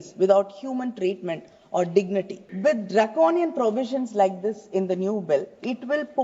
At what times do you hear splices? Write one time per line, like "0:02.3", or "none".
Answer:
0:02.4